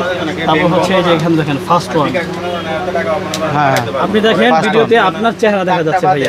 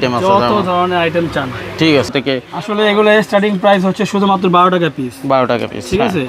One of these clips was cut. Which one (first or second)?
second